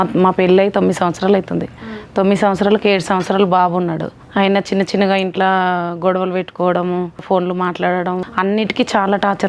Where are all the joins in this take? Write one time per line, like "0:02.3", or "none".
0:04.1
0:07.2
0:08.3